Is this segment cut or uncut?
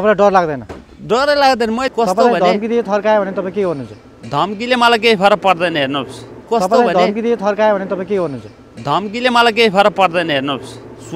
cut